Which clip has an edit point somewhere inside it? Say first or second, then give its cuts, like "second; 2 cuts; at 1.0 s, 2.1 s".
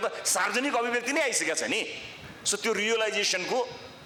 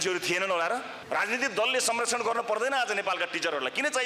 second; 1 cut; at 0.9 s